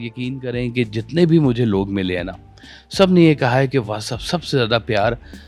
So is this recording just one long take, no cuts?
yes; 0 cuts

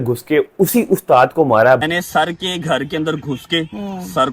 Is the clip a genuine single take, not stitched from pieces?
no; 1 cut; at 1.8 s

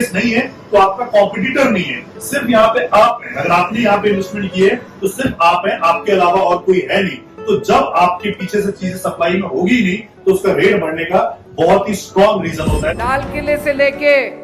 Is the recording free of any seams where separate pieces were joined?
no; 1 cut; at 13.0 s

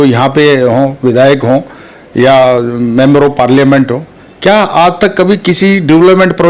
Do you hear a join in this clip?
no; 0 cuts

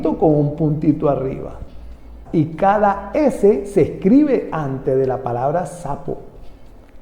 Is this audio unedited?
no; 1 cut; at 2.1 s

